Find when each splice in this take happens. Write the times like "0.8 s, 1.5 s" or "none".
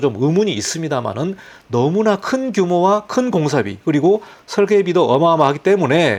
none